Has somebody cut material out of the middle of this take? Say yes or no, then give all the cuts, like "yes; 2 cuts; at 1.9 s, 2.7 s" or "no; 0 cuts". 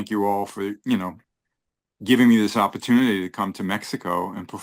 no; 0 cuts